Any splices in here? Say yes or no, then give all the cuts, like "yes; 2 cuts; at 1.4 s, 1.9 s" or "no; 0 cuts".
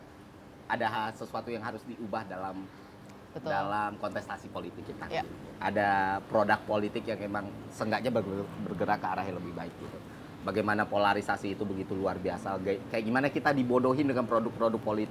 no; 0 cuts